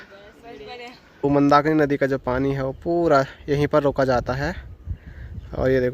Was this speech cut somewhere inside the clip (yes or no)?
yes